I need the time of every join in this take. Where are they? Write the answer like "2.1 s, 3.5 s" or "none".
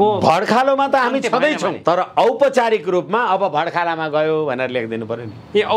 1.8 s